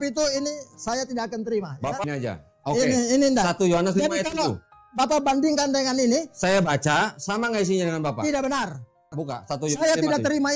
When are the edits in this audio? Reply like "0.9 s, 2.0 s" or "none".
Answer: 2.1 s, 9.1 s